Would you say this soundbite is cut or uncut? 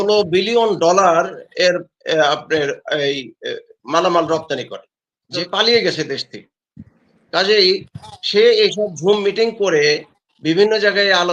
cut